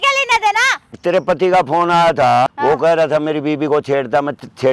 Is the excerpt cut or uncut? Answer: cut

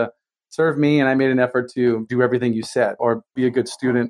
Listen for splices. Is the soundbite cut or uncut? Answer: cut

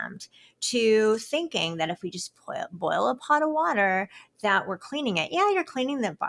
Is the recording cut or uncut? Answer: uncut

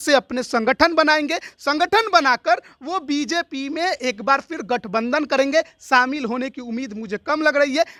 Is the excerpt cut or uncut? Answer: uncut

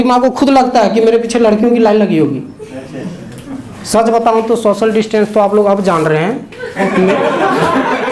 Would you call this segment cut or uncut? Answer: uncut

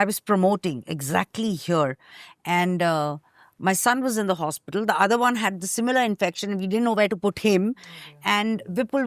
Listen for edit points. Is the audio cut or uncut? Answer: uncut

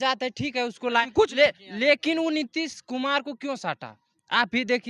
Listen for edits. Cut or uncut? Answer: uncut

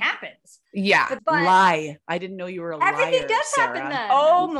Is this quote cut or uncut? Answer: uncut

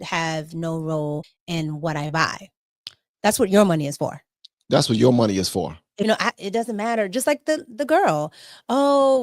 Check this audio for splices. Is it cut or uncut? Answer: cut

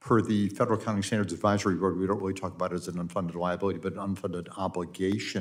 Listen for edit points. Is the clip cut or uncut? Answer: uncut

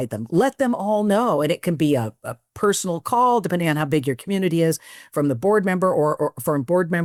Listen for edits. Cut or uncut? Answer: uncut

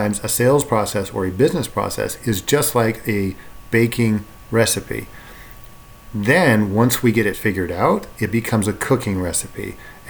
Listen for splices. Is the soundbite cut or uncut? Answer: uncut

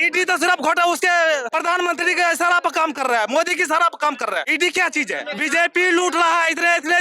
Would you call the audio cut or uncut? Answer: cut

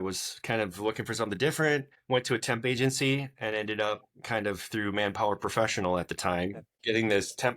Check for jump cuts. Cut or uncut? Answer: cut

